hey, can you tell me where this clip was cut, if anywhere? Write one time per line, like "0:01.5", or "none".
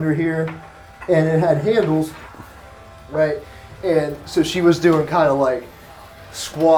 none